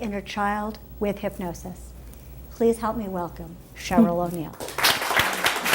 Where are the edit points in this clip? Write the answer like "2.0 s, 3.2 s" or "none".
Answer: 1.2 s